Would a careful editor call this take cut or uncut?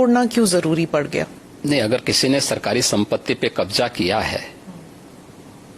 uncut